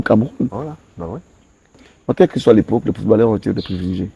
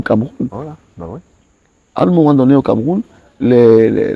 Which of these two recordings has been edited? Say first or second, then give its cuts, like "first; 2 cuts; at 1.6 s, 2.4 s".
first; 1 cut; at 1.7 s